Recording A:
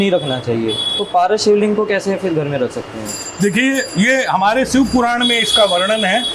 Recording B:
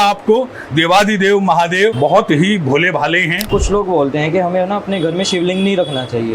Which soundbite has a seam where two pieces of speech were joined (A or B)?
B